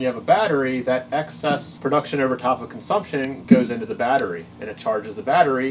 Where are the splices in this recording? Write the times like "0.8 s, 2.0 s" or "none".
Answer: 1.7 s, 3.4 s